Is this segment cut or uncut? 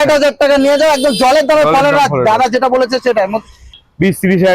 cut